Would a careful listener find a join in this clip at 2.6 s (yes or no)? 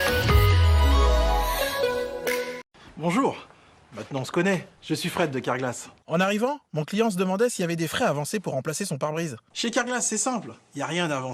yes